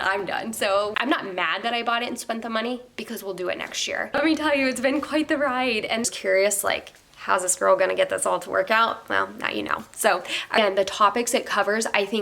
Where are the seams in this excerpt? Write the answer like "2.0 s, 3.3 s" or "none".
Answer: 0.9 s, 4.2 s, 6.0 s, 10.6 s